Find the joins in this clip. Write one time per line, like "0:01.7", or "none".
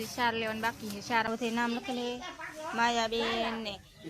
0:01.2